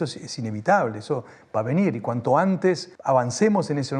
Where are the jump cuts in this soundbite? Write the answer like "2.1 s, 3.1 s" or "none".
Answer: 2.9 s